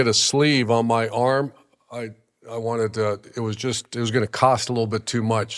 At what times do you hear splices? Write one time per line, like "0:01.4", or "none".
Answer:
none